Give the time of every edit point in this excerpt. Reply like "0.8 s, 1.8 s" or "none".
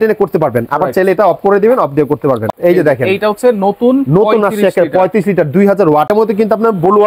2.5 s, 6.1 s